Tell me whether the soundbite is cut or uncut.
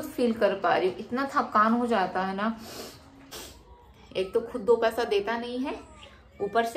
cut